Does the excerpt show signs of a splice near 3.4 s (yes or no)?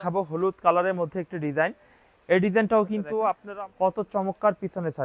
yes